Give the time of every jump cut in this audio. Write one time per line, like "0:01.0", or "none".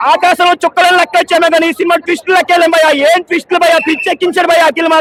none